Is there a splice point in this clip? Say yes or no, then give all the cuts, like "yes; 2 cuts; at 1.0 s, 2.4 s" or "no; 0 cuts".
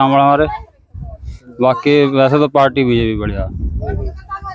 no; 0 cuts